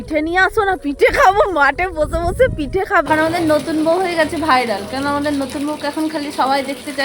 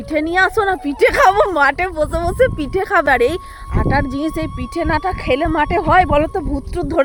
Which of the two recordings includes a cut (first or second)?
first